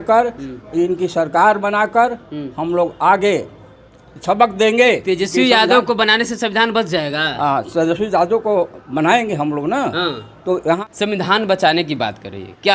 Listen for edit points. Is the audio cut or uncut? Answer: cut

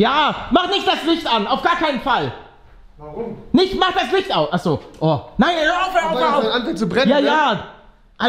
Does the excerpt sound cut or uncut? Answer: uncut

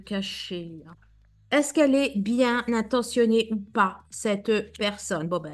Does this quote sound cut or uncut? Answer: cut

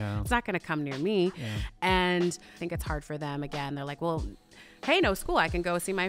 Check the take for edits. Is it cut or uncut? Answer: cut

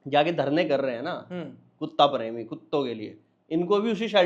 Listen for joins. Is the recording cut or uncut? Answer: uncut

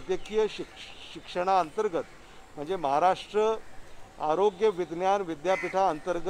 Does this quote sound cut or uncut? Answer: uncut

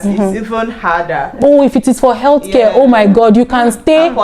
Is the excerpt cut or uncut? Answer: cut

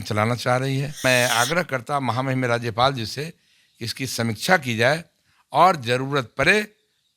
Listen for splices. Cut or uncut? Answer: cut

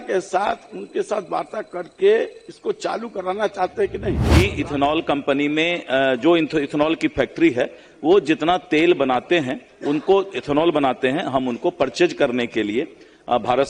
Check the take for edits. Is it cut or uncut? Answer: cut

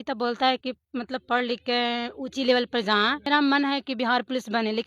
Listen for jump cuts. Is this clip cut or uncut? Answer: cut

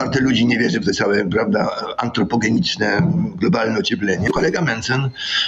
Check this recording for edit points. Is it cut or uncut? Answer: cut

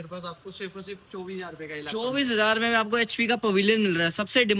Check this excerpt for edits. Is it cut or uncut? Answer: uncut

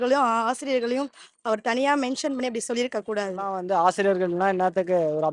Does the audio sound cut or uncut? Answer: cut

